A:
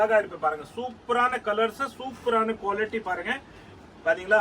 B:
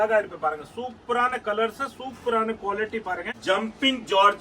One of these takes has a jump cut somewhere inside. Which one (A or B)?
B